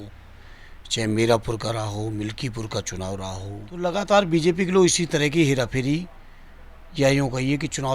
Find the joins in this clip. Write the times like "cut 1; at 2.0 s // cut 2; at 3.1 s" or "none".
cut 1; at 3.8 s